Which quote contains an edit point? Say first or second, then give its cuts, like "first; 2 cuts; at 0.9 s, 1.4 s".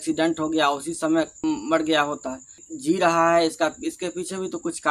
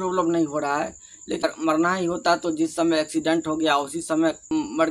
second; 1 cut; at 1.4 s